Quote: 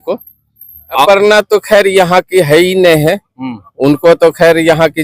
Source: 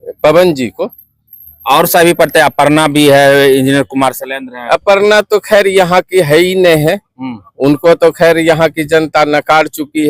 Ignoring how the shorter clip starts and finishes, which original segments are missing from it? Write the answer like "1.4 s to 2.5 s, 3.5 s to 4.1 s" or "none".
1.8 s to 4.8 s

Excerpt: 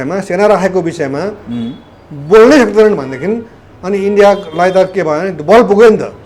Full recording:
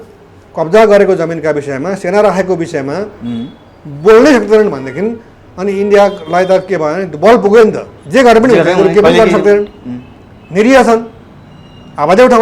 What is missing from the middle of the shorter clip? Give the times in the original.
none

